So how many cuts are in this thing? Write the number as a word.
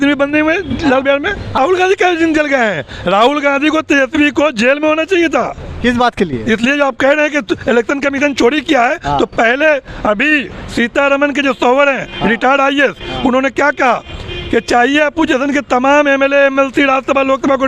one